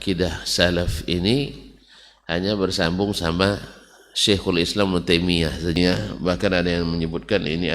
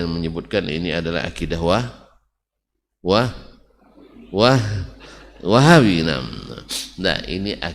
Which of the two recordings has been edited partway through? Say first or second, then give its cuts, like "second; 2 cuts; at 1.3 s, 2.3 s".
first; 1 cut; at 5.8 s